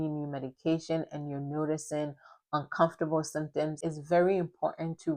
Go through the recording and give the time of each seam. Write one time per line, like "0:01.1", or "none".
0:03.8